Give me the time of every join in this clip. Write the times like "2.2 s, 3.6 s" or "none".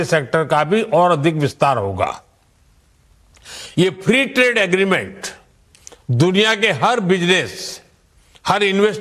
4.0 s